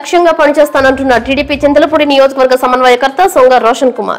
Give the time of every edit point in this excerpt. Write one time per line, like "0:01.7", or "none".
none